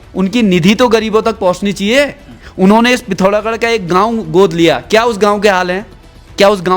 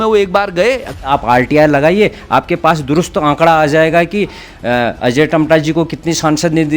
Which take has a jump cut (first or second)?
second